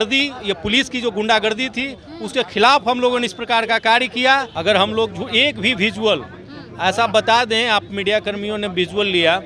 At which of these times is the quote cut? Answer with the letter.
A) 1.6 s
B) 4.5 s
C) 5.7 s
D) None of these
B